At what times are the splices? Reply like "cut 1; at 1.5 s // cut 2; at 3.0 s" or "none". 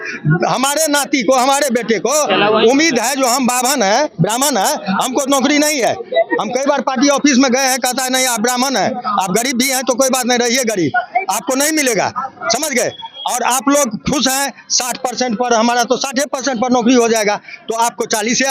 none